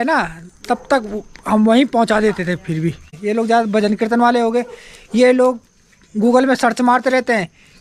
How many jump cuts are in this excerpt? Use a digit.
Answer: 1